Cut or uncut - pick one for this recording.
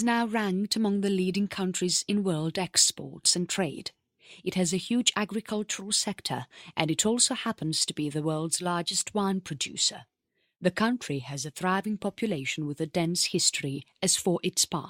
cut